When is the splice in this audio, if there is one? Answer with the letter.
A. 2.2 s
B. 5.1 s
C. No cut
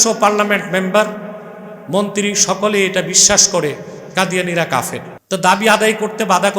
B